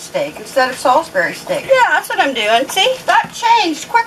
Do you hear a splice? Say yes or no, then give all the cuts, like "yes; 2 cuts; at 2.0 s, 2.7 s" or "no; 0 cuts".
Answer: yes; 1 cut; at 3.0 s